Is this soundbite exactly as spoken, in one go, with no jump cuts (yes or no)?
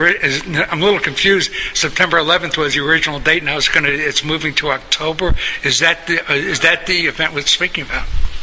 no